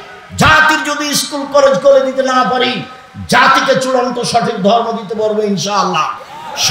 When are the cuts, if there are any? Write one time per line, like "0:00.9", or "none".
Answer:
none